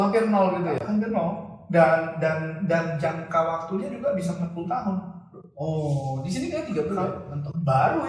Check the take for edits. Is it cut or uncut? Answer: uncut